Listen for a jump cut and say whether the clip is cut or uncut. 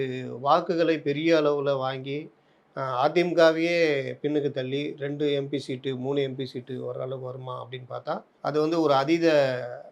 cut